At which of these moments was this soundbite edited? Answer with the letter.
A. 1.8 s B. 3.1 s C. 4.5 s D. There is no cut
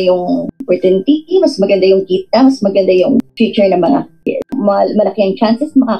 C